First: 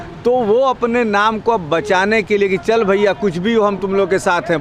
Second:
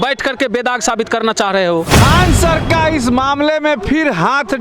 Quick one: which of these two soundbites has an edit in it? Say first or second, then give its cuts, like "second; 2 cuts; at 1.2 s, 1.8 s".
second; 1 cut; at 1.9 s